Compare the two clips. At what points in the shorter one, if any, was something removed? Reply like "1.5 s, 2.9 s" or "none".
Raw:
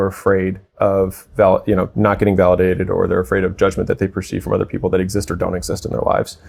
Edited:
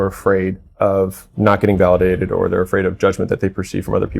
1.3 s